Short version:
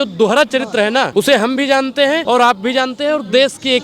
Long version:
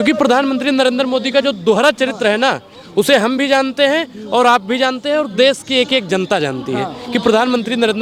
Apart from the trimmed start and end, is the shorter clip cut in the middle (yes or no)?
yes